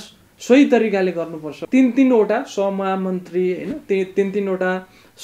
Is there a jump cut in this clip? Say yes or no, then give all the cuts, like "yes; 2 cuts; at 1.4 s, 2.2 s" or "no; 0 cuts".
yes; 1 cut; at 1.6 s